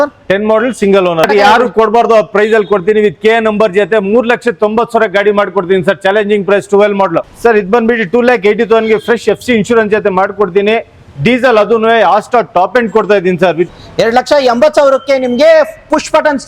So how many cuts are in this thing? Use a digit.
3